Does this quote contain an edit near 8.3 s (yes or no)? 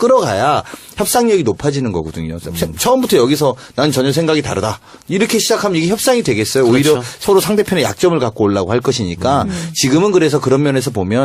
yes